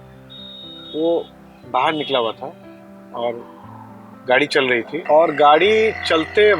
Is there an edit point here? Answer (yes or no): yes